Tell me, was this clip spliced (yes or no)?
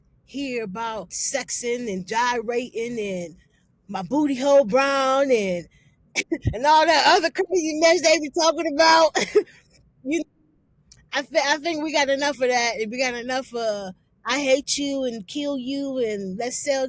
yes